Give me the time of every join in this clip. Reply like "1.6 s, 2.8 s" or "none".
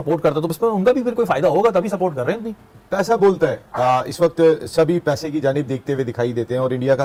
none